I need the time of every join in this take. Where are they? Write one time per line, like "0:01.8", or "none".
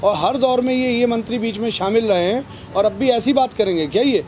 none